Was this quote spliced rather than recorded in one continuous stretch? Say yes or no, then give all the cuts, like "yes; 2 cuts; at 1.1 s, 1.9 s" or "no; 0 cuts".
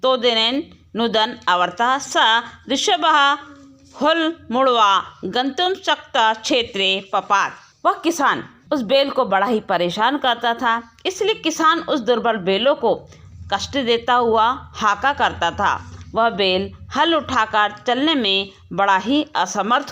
yes; 2 cuts; at 7.6 s, 8.5 s